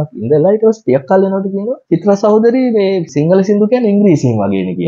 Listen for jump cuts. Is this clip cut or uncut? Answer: cut